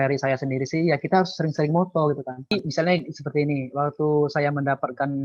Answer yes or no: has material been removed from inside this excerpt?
yes